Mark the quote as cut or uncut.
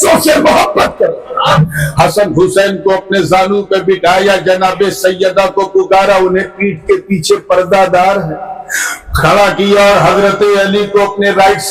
cut